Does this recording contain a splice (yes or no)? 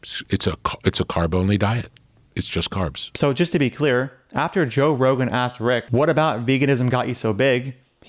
yes